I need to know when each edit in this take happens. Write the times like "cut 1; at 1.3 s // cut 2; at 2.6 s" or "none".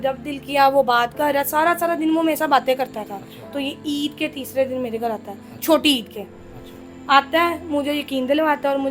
cut 1; at 3.5 s